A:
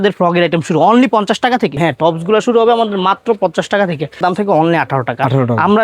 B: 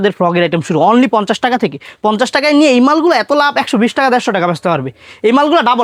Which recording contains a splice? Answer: A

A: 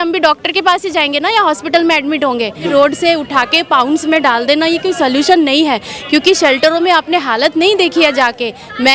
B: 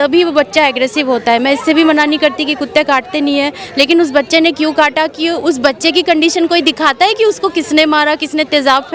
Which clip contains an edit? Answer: A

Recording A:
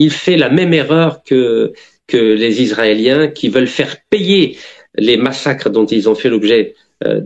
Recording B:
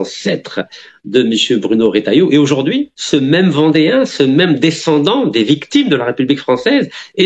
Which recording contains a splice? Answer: B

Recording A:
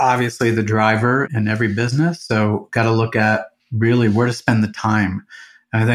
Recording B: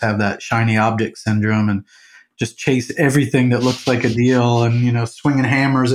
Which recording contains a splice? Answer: A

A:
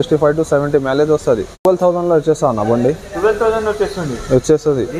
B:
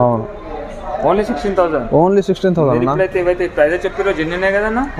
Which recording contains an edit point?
A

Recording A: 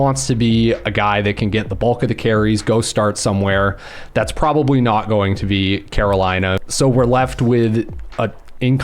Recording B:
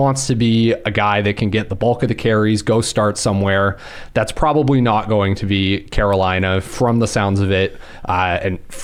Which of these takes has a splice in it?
A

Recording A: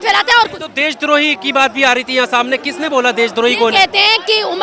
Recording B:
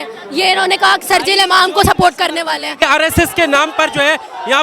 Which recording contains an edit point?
B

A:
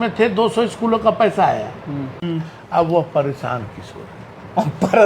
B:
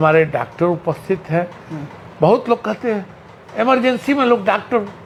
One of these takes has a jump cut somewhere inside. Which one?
A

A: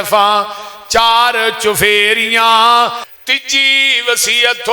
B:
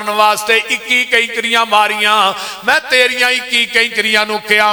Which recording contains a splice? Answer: A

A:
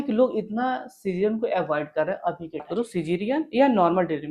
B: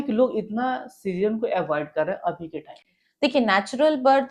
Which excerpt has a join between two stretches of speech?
A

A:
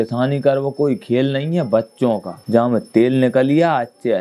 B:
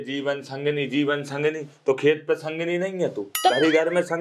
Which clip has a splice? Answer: A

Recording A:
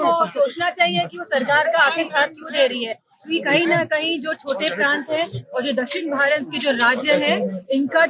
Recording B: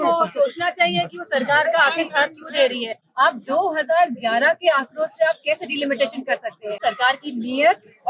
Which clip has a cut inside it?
B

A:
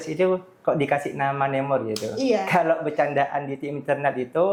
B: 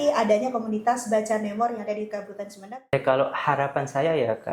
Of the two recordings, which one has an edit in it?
B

